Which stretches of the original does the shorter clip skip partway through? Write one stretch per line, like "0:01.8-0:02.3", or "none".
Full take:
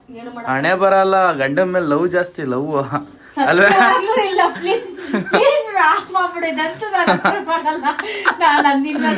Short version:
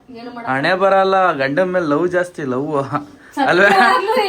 none